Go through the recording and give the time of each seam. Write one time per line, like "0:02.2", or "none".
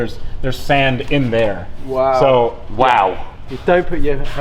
none